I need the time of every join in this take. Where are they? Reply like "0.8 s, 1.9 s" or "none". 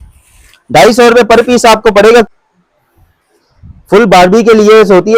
2.3 s